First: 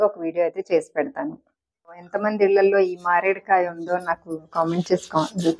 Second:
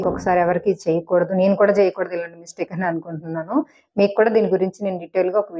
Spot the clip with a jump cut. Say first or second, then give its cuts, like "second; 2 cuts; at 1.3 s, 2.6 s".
first; 1 cut; at 2.0 s